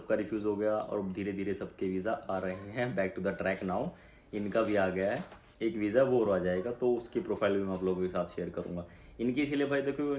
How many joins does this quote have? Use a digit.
0